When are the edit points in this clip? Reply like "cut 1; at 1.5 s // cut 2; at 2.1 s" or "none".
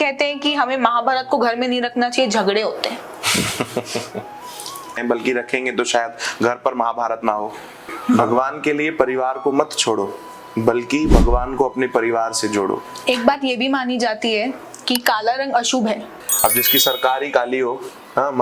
cut 1; at 5.0 s // cut 2; at 8.2 s // cut 3; at 12.9 s // cut 4; at 16.1 s